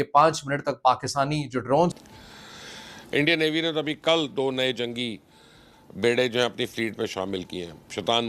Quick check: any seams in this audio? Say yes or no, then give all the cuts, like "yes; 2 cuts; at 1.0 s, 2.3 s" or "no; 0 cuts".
yes; 1 cut; at 1.9 s